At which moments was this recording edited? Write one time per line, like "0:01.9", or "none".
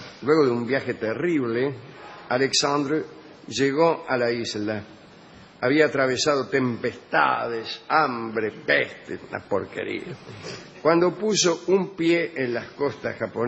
0:02.1

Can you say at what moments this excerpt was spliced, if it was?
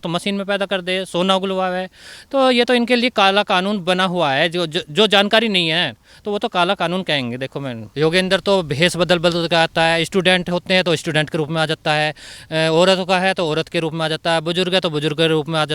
0:07.8

